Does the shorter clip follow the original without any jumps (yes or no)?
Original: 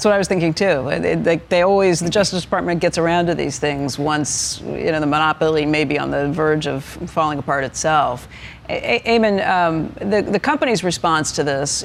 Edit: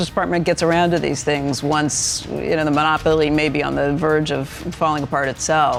yes